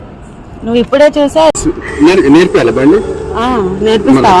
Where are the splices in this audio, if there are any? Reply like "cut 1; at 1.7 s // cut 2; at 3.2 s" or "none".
cut 1; at 1.6 s